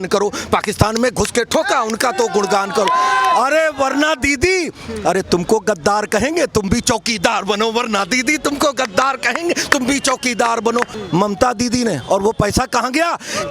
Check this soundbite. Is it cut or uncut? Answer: cut